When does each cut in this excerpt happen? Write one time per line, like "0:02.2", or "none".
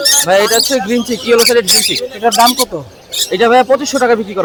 none